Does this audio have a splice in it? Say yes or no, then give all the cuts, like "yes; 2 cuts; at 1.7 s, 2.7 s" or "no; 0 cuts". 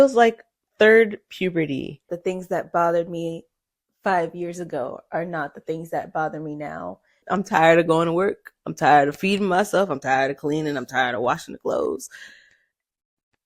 yes; 2 cuts; at 2.1 s, 7.2 s